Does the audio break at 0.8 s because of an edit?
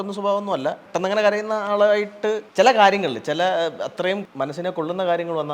yes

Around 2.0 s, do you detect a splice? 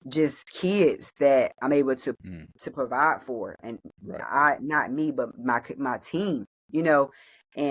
no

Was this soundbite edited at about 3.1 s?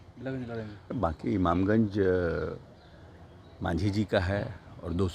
no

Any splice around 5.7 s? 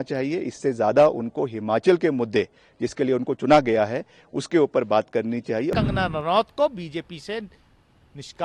yes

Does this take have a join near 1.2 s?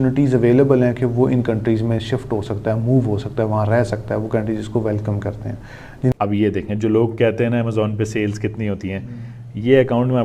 no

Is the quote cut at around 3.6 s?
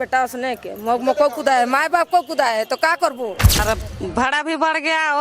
yes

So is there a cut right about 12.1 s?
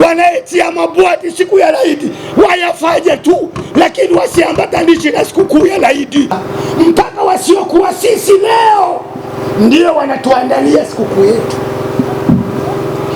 no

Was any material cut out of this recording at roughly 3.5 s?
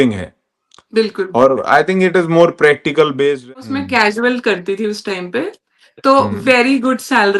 yes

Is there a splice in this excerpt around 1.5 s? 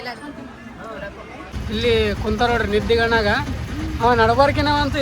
yes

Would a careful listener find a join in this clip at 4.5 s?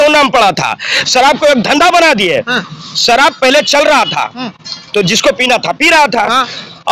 no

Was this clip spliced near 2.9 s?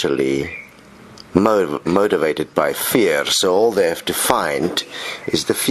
no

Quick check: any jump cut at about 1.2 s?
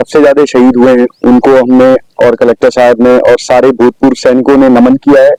no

